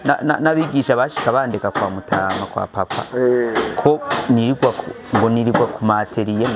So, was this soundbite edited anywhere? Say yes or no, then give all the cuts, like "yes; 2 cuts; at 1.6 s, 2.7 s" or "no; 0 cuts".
no; 0 cuts